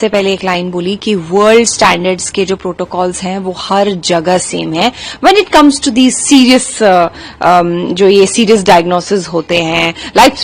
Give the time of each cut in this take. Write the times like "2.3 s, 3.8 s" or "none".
none